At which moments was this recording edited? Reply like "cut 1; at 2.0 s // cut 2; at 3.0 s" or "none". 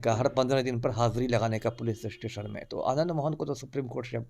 none